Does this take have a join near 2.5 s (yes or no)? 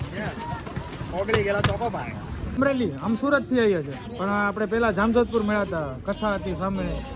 yes